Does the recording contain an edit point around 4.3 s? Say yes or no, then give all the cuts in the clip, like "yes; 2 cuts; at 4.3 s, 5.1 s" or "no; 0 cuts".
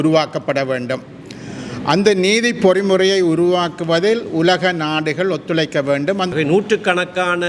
no; 1 cut; at 6.3 s